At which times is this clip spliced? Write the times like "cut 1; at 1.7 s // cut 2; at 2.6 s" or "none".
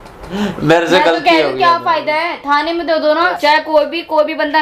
cut 1; at 3.3 s